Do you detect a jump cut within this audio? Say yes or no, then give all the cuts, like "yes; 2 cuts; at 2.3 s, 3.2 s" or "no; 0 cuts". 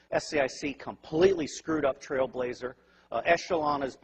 no; 0 cuts